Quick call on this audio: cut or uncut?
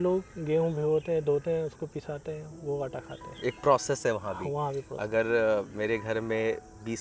uncut